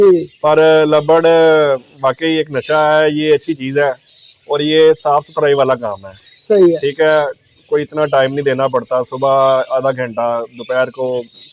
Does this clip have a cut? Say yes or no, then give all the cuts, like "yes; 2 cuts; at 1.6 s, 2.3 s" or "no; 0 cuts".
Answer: no; 0 cuts